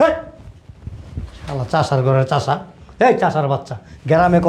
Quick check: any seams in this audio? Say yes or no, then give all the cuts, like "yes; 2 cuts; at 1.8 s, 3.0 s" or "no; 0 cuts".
no; 0 cuts